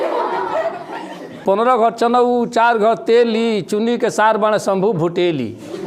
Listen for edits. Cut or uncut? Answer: cut